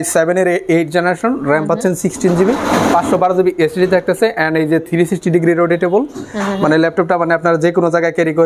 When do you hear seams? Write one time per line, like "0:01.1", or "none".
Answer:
none